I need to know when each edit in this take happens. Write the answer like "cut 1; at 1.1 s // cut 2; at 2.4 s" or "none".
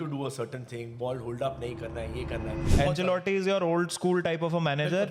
cut 1; at 2.8 s

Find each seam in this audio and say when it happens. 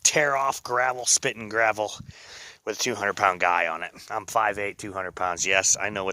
none

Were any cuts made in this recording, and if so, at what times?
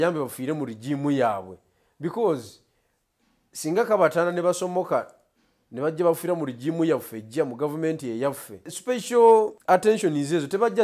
cut 1; at 8.7 s // cut 2; at 9.6 s

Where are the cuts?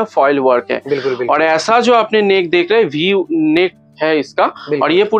none

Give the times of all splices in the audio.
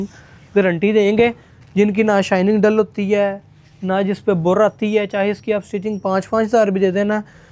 cut 1; at 1.5 s

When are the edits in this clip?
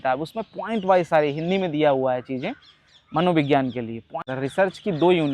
cut 1; at 4.1 s

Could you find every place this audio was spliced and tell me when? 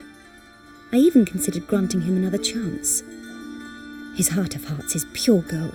none

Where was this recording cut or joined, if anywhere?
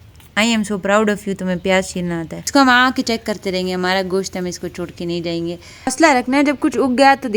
cut 1; at 2.4 s // cut 2; at 5.9 s

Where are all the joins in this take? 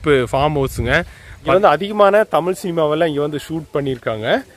cut 1; at 1.6 s

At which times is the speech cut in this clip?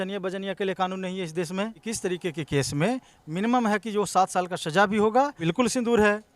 cut 1; at 1.9 s // cut 2; at 5.4 s

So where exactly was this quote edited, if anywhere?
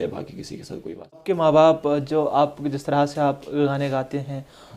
cut 1; at 1.3 s

